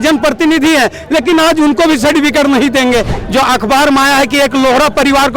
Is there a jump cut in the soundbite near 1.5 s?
no; 1 cut; at 3.1 s

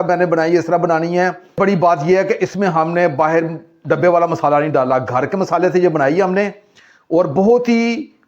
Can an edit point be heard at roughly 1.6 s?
yes; 1 cut; at 1.6 s

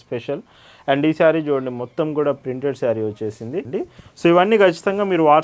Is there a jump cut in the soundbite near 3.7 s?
yes; 1 cut; at 3.7 s

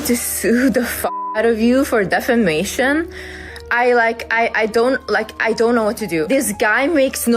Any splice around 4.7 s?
no; 1 cut; at 6.3 s

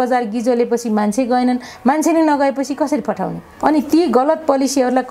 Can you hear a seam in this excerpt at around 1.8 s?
no; 1 cut; at 3.4 s

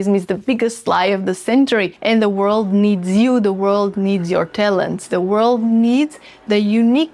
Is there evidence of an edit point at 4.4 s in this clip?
no; 1 cut; at 1.9 s

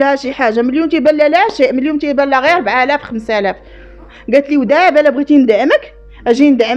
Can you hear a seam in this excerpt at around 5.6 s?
no; 1 cut; at 4.1 s

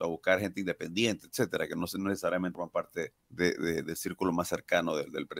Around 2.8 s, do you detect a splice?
yes; 1 cut; at 2.8 s

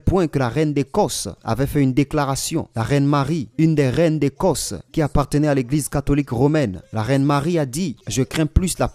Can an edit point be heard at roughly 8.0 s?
yes; 1 cut; at 8.0 s

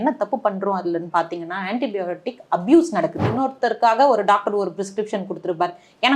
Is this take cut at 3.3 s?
yes; 1 cut; at 3.3 s

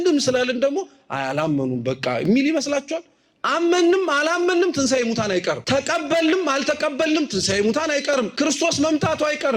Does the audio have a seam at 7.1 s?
no; 2 cuts; at 5.6 s, 8.3 s

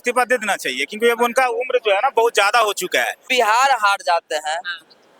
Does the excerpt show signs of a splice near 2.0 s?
no; 1 cut; at 3.3 s

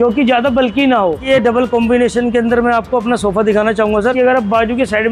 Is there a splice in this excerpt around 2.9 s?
no; 2 cuts; at 1.2 s, 4.1 s

